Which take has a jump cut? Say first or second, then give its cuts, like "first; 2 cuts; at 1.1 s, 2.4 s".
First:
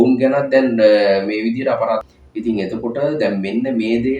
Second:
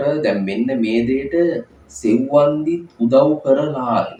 first; 1 cut; at 2.0 s